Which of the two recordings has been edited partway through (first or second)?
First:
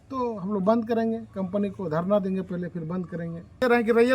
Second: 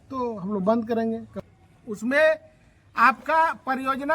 second